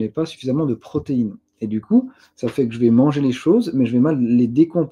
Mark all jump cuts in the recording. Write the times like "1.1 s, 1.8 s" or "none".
none